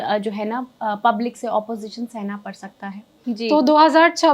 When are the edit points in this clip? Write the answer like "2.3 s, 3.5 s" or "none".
3.2 s